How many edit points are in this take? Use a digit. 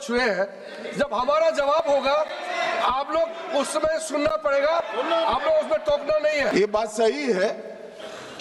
1